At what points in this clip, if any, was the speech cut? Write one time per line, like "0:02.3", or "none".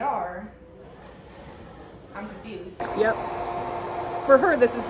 0:02.8